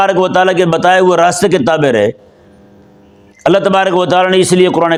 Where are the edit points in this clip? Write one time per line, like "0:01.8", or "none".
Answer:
none